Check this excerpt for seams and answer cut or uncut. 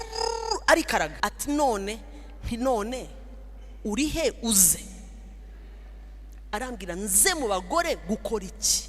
cut